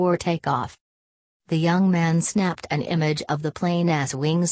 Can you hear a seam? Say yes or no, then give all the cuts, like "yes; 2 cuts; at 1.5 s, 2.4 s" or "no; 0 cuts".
yes; 1 cut; at 3.4 s